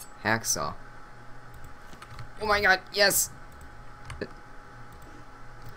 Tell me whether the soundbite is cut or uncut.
cut